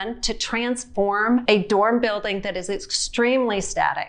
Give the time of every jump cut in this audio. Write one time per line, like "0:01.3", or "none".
0:01.4